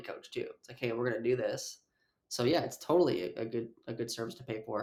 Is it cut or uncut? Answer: uncut